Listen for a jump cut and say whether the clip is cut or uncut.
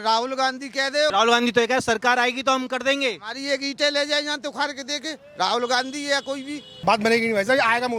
cut